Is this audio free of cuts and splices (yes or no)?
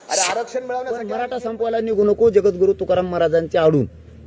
no